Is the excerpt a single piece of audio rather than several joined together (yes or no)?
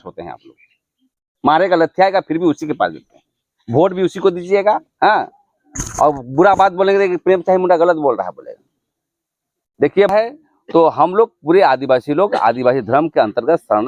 no